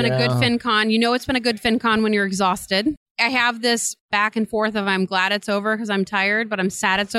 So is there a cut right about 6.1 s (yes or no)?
no